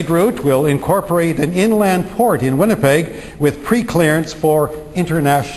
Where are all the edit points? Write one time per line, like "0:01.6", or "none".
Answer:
none